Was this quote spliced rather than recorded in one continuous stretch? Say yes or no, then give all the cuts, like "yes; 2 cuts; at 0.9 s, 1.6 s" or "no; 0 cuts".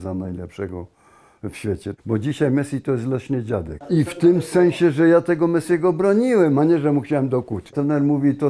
yes; 3 cuts; at 1.9 s, 3.8 s, 7.7 s